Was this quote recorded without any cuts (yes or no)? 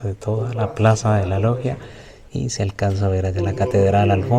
yes